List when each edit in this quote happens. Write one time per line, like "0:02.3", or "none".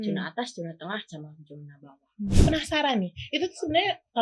0:02.4